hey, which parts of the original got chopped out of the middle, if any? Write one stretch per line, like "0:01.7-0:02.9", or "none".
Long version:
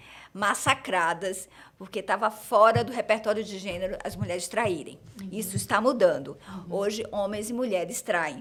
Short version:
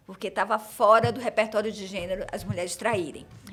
none